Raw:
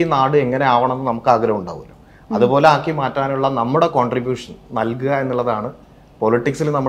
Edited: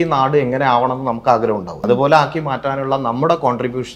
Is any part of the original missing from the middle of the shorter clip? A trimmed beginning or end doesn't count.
yes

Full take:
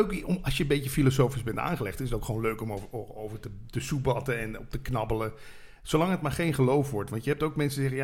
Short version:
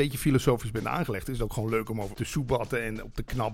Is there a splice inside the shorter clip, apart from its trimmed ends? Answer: yes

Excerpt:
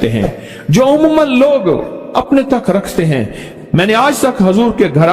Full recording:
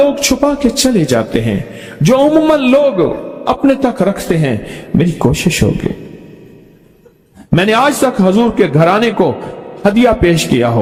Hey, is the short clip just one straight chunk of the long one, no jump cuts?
no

